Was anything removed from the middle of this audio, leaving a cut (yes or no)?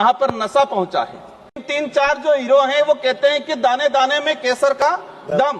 yes